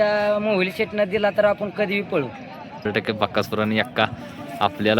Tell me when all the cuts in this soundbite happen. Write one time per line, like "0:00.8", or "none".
0:02.8